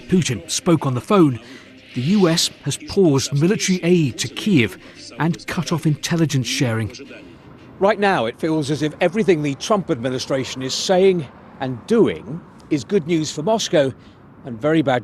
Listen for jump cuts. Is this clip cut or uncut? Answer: cut